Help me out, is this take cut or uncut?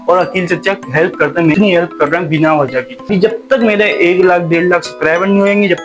cut